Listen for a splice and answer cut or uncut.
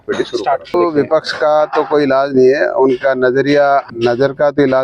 cut